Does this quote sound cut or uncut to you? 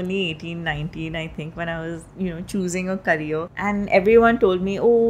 cut